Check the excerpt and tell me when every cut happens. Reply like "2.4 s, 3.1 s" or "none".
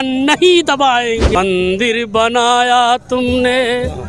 1.4 s